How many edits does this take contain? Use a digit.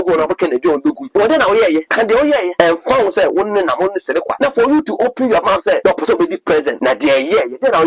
5